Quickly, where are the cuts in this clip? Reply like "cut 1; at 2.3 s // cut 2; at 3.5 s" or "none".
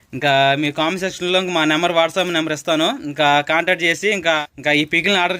cut 1; at 4.4 s